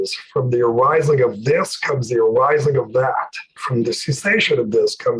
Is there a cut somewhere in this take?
yes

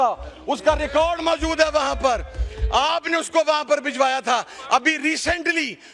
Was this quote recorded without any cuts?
yes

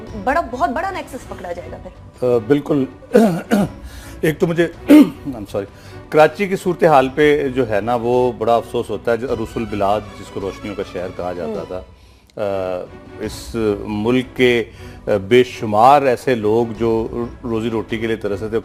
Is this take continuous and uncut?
yes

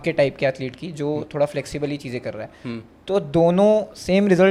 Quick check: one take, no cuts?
yes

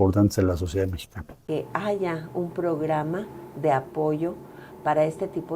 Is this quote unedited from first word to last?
yes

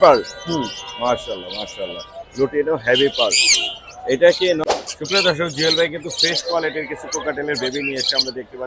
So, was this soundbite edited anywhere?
yes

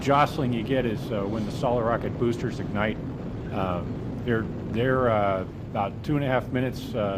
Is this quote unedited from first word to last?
no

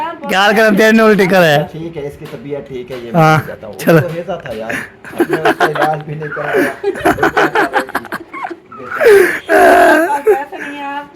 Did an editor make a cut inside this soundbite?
no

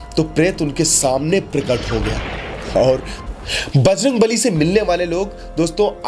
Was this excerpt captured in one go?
no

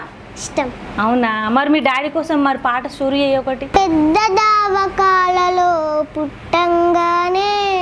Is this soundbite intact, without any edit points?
no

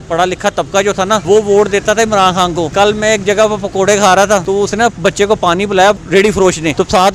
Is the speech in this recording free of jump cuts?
no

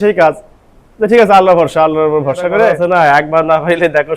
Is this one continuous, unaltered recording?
no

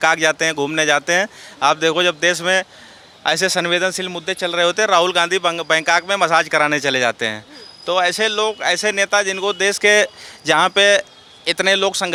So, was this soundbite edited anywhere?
no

